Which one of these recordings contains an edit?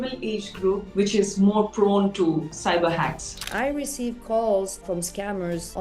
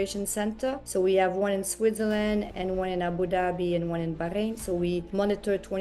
first; 3 cuts; at 2.5 s, 3.5 s, 4.8 s

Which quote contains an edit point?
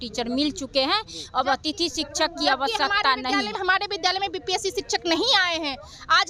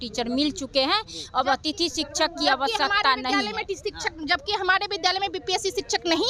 first; 1 cut; at 3.6 s

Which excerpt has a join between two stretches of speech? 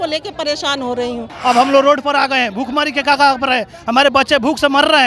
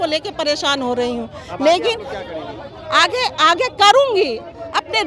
first; 1 cut; at 1.3 s

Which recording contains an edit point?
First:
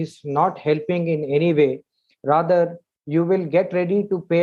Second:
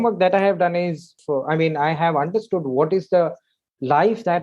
second; 1 cut; at 1.2 s

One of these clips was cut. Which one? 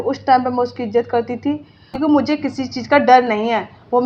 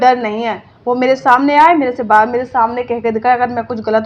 first; 1 cut; at 2.0 s

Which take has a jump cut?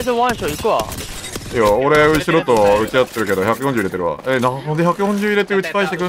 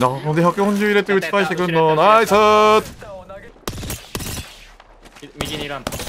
second; 1 cut; at 3.5 s

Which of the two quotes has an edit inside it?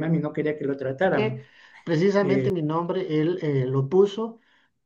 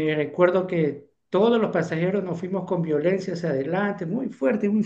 first; 1 cut; at 1.2 s

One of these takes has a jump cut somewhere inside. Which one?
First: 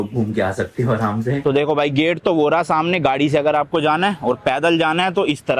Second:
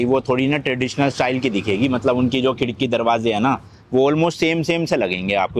first; 1 cut; at 1.4 s

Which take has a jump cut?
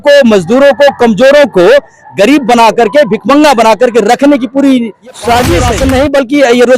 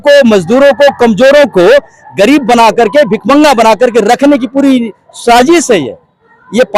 first; 1 cut; at 5.7 s

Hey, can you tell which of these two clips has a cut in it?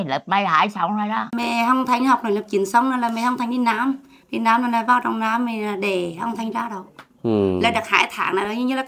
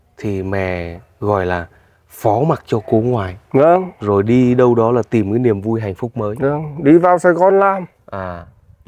first; 1 cut; at 1.4 s

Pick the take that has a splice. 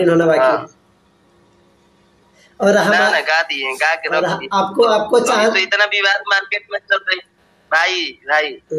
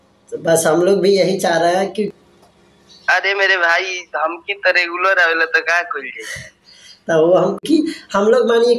second; 2 cuts; at 2.1 s, 7.6 s

